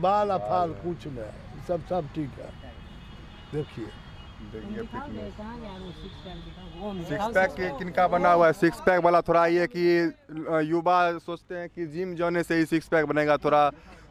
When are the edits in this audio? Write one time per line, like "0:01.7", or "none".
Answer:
none